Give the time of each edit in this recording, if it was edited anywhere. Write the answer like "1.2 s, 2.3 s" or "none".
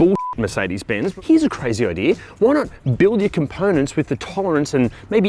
1.1 s